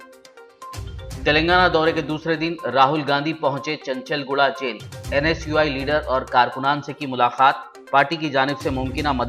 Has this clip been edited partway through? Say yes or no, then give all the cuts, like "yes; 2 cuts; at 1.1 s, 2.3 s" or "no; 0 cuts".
yes; 1 cut; at 1.1 s